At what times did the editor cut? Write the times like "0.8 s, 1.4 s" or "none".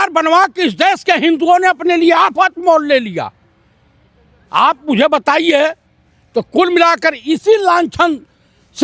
none